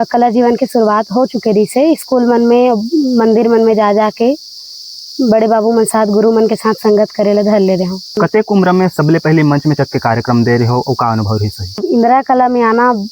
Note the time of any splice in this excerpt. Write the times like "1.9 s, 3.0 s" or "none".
8.2 s, 11.8 s